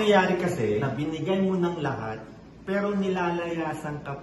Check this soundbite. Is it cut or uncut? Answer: cut